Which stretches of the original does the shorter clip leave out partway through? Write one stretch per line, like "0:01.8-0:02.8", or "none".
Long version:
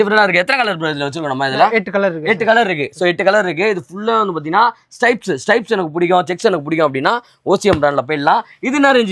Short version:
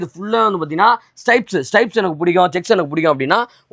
none